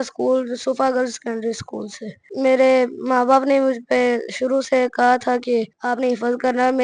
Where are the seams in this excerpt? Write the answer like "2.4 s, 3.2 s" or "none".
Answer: 2.3 s, 5.8 s